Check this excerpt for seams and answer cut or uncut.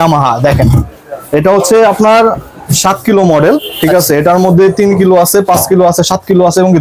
uncut